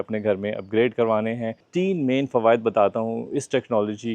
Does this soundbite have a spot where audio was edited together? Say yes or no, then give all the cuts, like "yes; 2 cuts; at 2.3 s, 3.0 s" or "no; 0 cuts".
yes; 1 cut; at 1.6 s